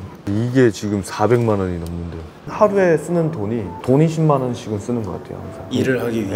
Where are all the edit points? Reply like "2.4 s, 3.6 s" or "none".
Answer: 2.4 s

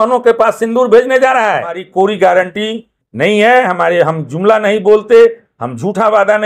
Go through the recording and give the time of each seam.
1.8 s

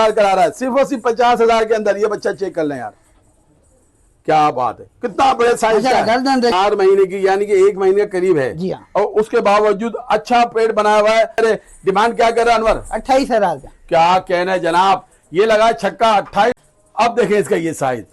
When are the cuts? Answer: 6.5 s, 11.4 s, 16.6 s

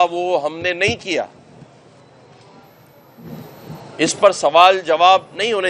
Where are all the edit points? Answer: none

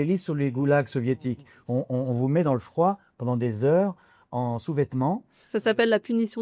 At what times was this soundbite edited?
none

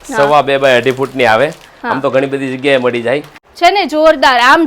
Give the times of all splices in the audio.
3.4 s

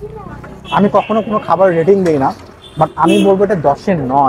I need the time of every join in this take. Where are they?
none

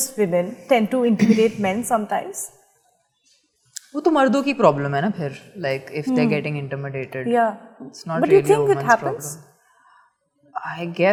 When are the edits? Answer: none

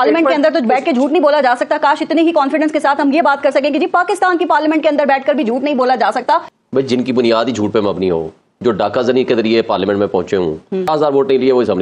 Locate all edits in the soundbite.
6.5 s, 10.9 s

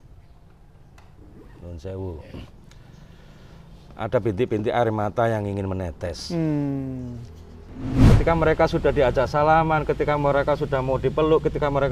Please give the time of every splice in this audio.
8.0 s

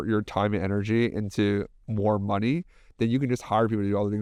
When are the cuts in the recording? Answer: none

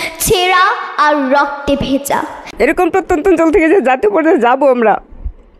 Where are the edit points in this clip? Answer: 2.4 s

